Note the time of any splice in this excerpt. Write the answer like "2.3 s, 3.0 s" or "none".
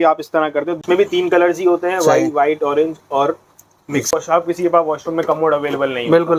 0.8 s, 4.1 s